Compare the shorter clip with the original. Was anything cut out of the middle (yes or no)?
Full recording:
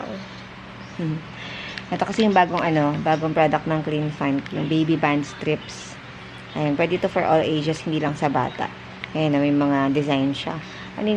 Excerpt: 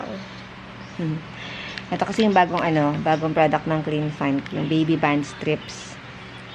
no